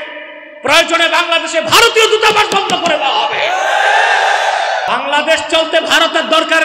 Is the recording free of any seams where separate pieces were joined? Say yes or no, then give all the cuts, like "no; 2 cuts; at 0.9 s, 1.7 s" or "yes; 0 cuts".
no; 1 cut; at 4.9 s